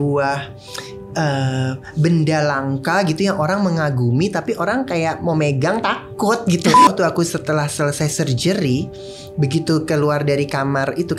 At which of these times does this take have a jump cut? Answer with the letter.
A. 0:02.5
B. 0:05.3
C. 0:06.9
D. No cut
C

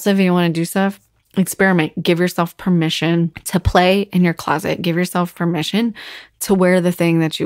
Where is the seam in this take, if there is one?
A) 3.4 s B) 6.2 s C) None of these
A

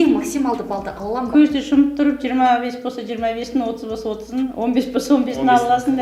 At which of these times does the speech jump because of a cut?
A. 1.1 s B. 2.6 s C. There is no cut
C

